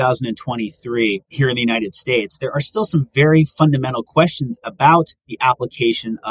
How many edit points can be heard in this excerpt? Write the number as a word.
one